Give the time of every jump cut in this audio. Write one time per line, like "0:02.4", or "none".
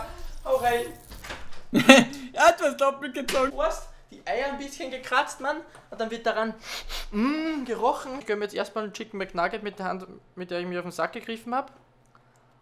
0:03.5
0:08.2